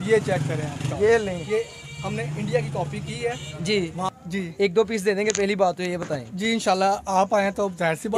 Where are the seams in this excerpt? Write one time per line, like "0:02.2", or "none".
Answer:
0:04.2